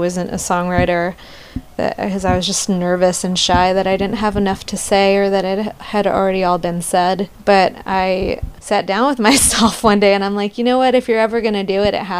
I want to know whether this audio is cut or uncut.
cut